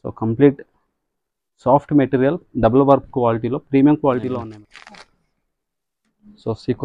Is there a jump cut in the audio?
yes; 1 cut; at 4.4 s

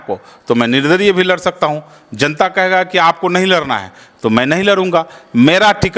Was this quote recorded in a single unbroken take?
yes; 0 cuts

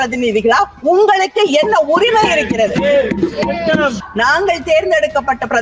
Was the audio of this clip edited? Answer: yes; 1 cut; at 4.0 s

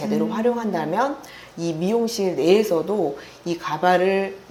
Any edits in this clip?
no; 0 cuts

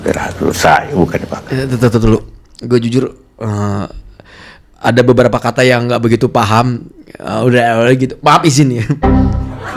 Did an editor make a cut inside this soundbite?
no; 0 cuts

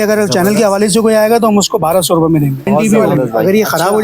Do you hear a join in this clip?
yes; 1 cut; at 2.7 s

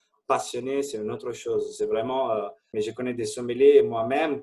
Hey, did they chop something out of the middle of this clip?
yes; 1 cut; at 2.6 s

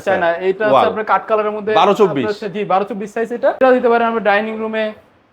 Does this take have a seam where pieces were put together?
yes; 1 cut; at 3.6 s

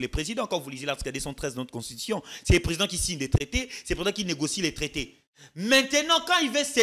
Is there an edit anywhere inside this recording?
no; 0 cuts

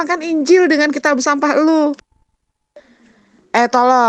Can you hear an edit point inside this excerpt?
yes; 1 cut; at 2.7 s

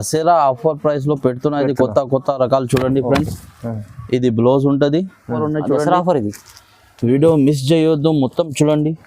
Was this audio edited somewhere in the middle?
yes; 1 cut; at 5.4 s

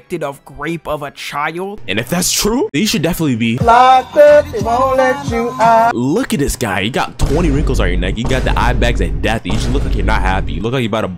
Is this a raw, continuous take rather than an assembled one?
no; 2 cuts; at 1.8 s, 5.9 s

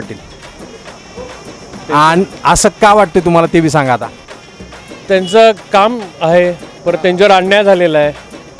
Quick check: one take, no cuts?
yes; 0 cuts

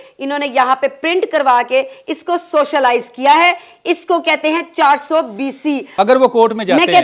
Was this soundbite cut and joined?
yes; 1 cut; at 5.9 s

